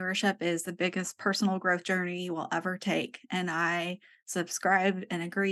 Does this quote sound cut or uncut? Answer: uncut